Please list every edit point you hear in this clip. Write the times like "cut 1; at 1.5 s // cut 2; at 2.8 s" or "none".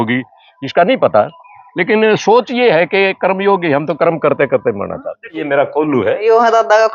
cut 1; at 5.4 s